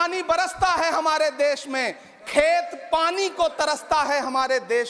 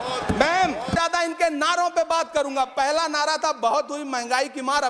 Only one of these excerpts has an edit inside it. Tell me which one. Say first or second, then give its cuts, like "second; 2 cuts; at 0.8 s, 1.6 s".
second; 1 cut; at 0.9 s